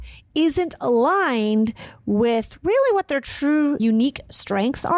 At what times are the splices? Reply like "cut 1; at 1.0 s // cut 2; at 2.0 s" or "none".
none